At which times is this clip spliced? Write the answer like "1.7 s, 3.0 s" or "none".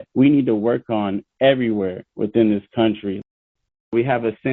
3.4 s